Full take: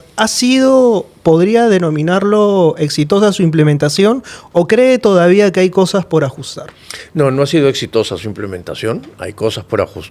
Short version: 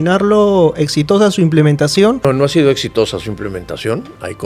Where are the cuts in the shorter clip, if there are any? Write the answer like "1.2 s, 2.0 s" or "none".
2.2 s